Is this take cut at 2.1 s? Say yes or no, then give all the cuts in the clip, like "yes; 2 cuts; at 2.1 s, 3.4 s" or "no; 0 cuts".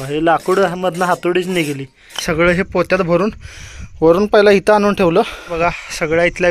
yes; 2 cuts; at 2.1 s, 5.5 s